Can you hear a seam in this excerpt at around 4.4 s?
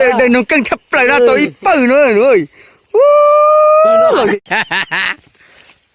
yes; 1 cut; at 4.4 s

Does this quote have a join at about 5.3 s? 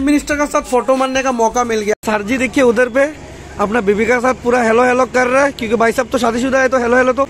no; 1 cut; at 2.1 s

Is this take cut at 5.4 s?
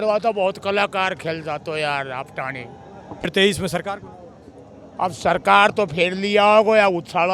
no; 1 cut; at 3.2 s

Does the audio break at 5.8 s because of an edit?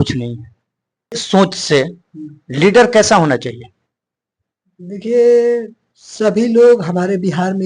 no; 1 cut; at 1.2 s

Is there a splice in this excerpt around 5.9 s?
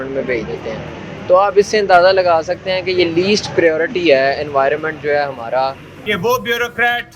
yes; 1 cut; at 5.9 s

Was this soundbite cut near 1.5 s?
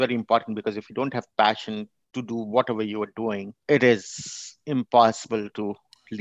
no; 1 cut; at 3.6 s

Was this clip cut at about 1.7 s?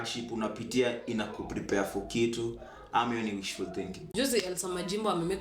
no; 1 cut; at 4.0 s

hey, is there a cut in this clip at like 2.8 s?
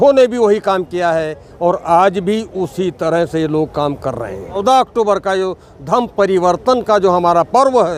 no; 1 cut; at 4.6 s

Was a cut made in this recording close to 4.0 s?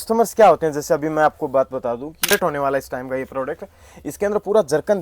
no; 1 cut; at 2.3 s

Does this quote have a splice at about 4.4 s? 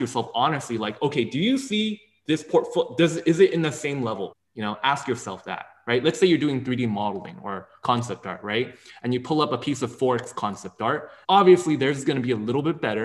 yes; 2 cuts; at 4.4 s, 11.1 s

